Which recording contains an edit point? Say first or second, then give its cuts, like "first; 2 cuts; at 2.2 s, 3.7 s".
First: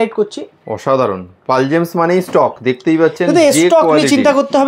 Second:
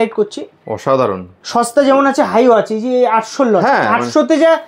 second; 1 cut; at 1.4 s